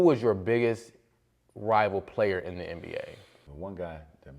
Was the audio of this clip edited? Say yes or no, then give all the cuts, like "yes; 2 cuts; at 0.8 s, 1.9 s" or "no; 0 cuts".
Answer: yes; 1 cut; at 3.2 s